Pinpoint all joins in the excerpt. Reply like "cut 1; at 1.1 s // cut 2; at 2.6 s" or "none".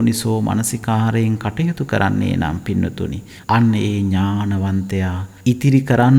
cut 1; at 3.3 s // cut 2; at 5.2 s